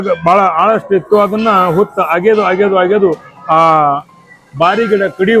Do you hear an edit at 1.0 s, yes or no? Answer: no